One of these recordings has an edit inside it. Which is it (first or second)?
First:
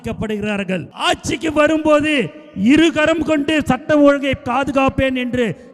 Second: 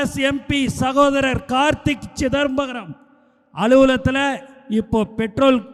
first